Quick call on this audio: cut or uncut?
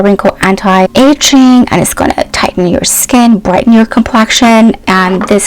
cut